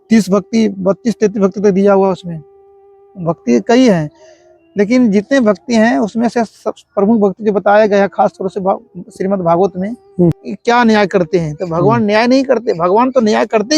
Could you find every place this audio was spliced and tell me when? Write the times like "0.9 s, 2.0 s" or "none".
10.5 s